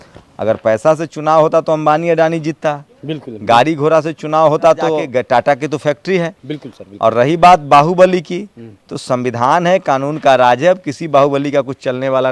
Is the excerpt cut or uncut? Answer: cut